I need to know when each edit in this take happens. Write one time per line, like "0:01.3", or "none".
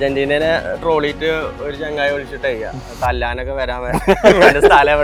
none